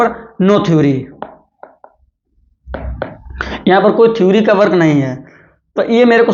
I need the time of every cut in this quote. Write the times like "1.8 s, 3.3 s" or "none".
none